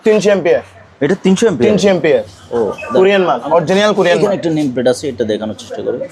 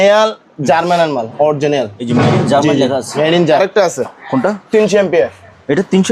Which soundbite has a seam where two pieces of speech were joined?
second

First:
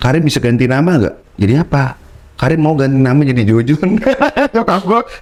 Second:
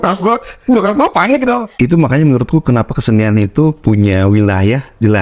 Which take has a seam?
second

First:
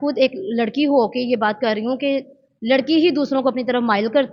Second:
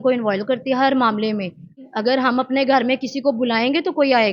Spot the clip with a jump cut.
second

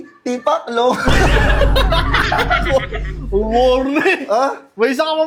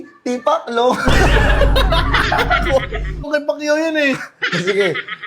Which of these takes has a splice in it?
second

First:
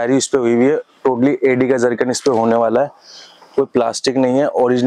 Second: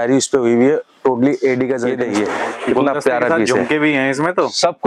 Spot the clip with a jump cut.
second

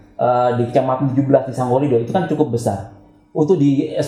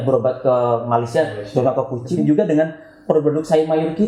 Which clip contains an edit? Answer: second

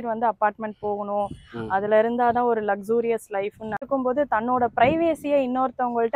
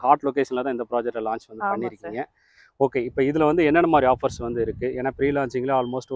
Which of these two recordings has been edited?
first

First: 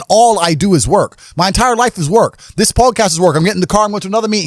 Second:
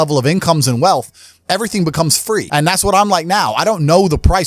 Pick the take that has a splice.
second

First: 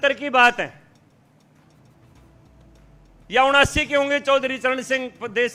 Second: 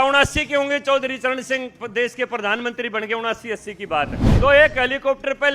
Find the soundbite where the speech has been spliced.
second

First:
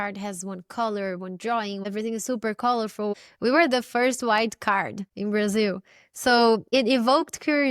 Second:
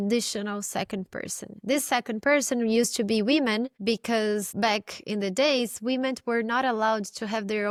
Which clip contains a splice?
first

